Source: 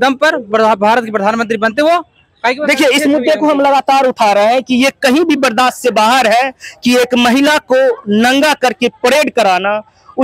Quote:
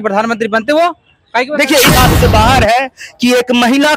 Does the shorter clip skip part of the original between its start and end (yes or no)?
yes